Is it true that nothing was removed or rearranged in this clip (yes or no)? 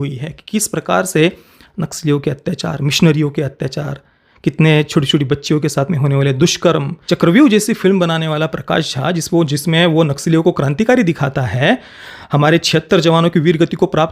no